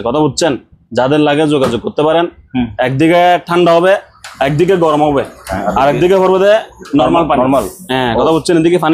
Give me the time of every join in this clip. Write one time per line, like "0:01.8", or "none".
none